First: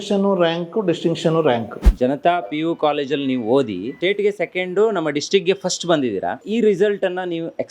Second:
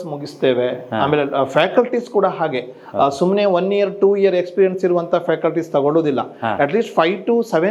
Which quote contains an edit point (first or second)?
first